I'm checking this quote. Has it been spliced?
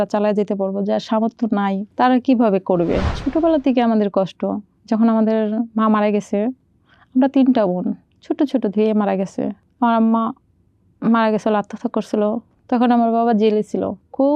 yes; 1 cut; at 3.1 s

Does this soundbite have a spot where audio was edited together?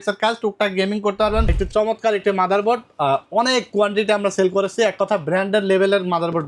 yes; 1 cut; at 1.5 s

